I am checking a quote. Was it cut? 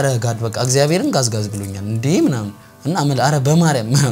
no; 0 cuts

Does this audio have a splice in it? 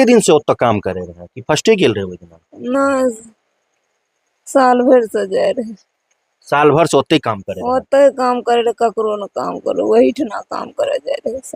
no; 0 cuts

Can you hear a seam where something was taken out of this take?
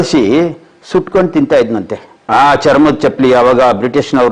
no; 0 cuts

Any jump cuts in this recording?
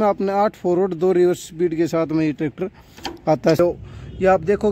yes; 1 cut; at 3.6 s

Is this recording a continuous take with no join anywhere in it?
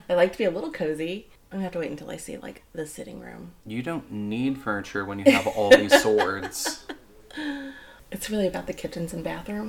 no; 2 cuts; at 1.4 s, 7.9 s

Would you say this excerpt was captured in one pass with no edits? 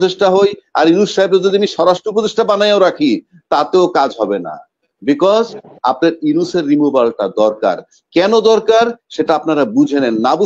yes; 0 cuts

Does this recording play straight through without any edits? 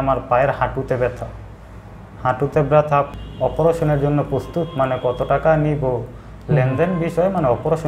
no; 1 cut; at 3.1 s

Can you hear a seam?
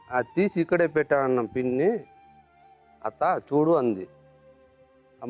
no; 0 cuts

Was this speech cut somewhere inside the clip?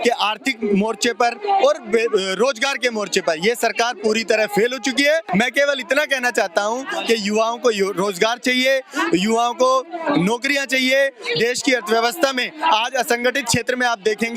no; 0 cuts

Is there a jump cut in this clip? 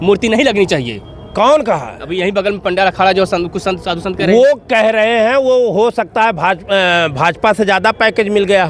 no; 0 cuts

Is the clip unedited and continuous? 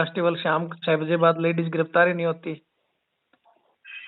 yes; 0 cuts

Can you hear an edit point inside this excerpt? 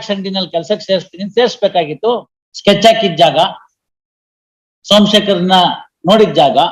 yes; 1 cut; at 2.0 s

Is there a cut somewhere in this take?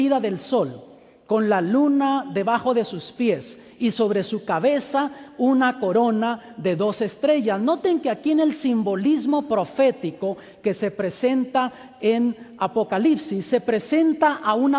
no; 0 cuts

